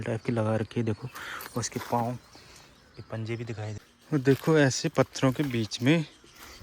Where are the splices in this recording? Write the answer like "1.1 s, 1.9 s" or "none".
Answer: 3.8 s